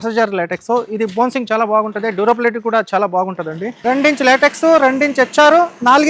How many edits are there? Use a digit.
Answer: 1